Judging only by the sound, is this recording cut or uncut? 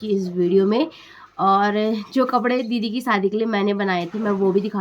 uncut